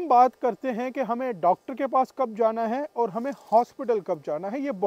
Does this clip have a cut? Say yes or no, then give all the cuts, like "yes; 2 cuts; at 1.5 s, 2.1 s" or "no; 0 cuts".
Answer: no; 0 cuts